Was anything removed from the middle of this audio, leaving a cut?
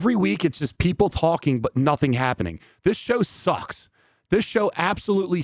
no; 0 cuts

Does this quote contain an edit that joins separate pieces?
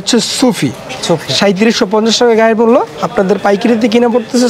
no; 0 cuts

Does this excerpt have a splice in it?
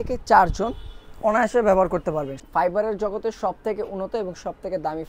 yes; 1 cut; at 2.4 s

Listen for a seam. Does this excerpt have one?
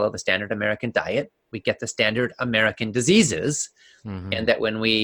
no; 0 cuts

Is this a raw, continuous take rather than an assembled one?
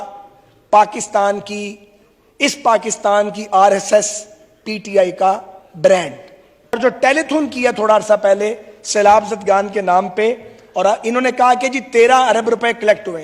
no; 1 cut; at 6.8 s

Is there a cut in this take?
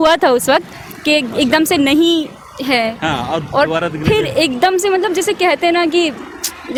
no; 0 cuts

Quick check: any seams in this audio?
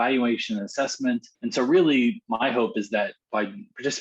yes; 3 cuts; at 1.3 s, 2.2 s, 3.2 s

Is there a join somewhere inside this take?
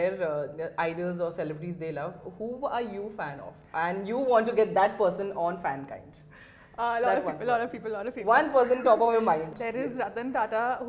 yes; 1 cut; at 9.5 s

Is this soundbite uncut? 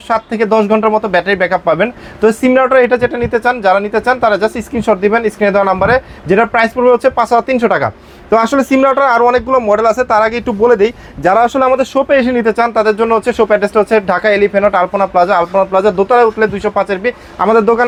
yes; 0 cuts

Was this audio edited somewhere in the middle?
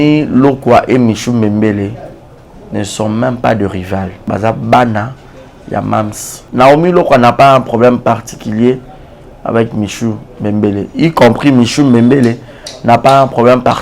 yes; 2 cuts; at 4.2 s, 6.4 s

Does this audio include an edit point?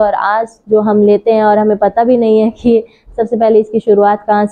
no; 0 cuts

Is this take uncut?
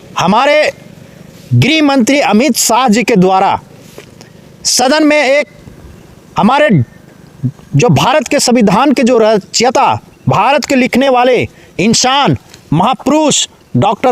yes; 0 cuts

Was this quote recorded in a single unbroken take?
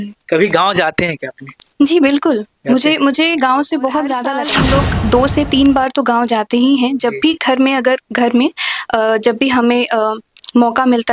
no; 1 cut; at 4.4 s

